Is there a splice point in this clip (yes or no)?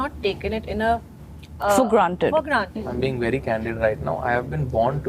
yes